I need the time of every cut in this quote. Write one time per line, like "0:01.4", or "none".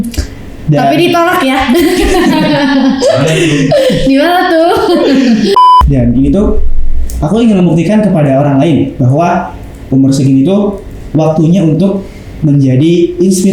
0:05.6